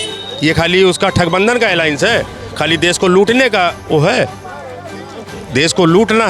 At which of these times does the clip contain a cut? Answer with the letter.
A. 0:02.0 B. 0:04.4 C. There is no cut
C